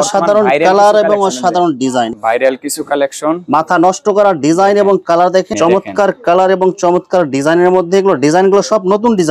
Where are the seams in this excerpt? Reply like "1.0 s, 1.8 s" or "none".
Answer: 2.1 s, 5.5 s